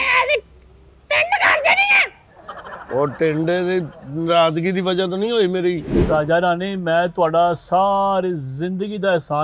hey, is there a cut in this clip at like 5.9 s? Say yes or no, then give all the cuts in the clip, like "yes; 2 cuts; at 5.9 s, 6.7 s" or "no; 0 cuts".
yes; 1 cut; at 5.9 s